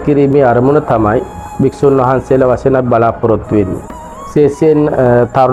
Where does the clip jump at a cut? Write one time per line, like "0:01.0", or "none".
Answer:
none

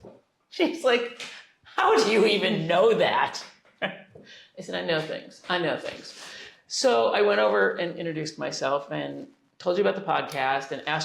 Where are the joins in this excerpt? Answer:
none

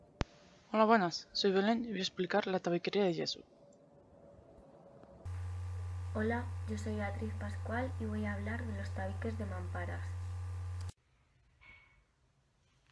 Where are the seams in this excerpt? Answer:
0:08.9

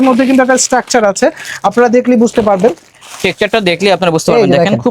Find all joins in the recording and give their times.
none

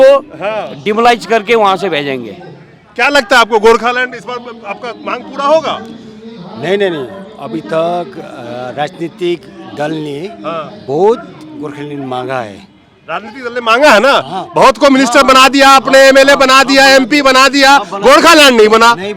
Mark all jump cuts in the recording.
none

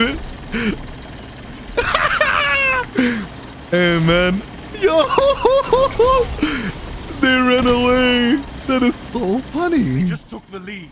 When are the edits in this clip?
none

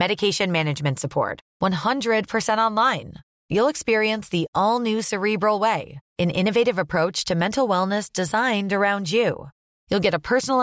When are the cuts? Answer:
none

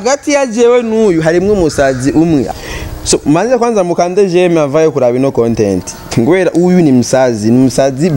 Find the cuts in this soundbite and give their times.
0:02.5

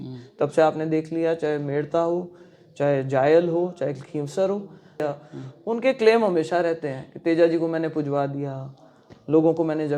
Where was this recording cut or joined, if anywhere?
0:05.0

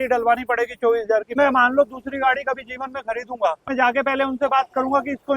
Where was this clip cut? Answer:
0:01.3
0:03.7

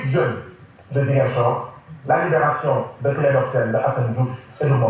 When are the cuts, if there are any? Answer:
none

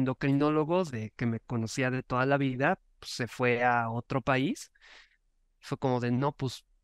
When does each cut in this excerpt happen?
none

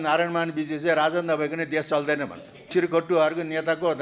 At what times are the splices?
0:02.7

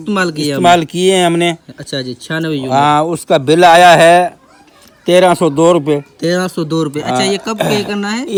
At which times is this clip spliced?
none

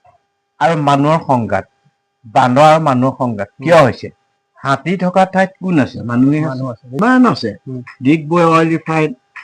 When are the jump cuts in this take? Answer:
0:06.9

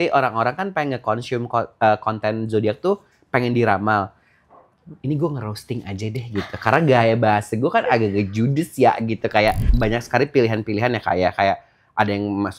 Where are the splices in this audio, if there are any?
0:09.7

